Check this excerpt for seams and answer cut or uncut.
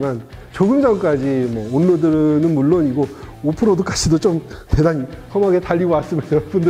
uncut